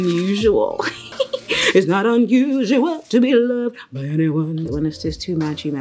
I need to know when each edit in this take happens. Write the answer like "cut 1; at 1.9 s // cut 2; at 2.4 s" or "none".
cut 1; at 4.6 s

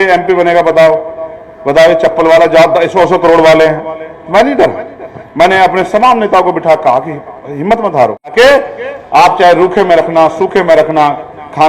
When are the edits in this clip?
cut 1; at 8.3 s

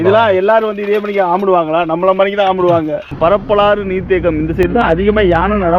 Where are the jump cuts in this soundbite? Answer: cut 1; at 3.1 s

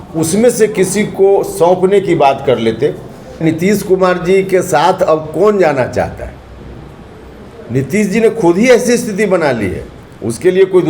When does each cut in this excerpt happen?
cut 1; at 3.4 s

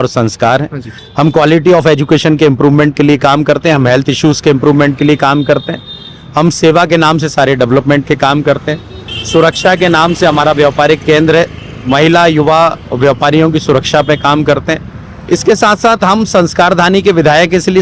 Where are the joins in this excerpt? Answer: none

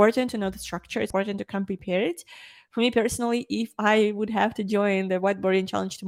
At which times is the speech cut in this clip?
cut 1; at 1.1 s

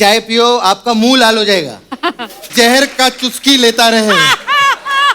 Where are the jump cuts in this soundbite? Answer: cut 1; at 2.5 s

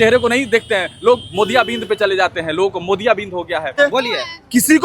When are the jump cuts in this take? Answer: cut 1; at 3.7 s

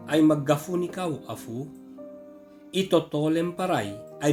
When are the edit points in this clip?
none

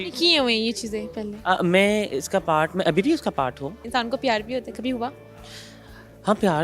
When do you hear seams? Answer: cut 1; at 3.8 s

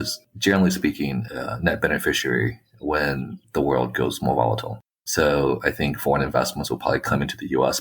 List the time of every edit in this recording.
cut 1; at 1.2 s // cut 2; at 4.9 s

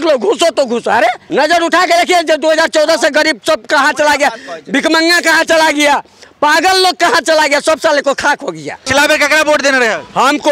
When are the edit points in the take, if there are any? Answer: cut 1; at 1.2 s // cut 2; at 8.9 s

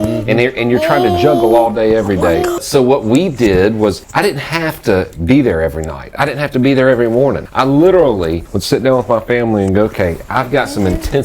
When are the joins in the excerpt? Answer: cut 1; at 2.6 s // cut 2; at 4.0 s // cut 3; at 7.5 s // cut 4; at 8.5 s

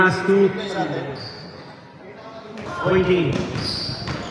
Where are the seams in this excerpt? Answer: cut 1; at 2.7 s

